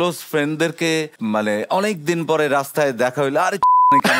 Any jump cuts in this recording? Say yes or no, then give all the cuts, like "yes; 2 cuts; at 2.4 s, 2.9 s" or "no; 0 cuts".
yes; 1 cut; at 1.1 s